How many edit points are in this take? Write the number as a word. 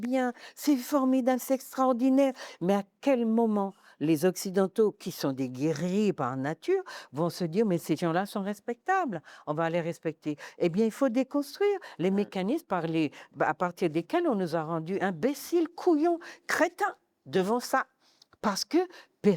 zero